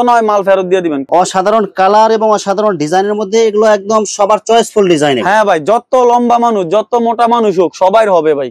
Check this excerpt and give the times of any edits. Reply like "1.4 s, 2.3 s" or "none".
none